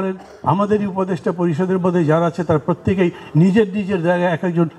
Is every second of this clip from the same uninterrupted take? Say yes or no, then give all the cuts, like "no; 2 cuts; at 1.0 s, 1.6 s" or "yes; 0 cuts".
yes; 0 cuts